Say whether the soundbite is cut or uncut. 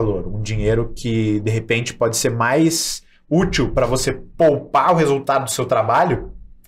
uncut